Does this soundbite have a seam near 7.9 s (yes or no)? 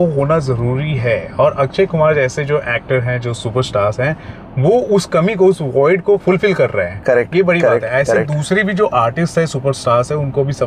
no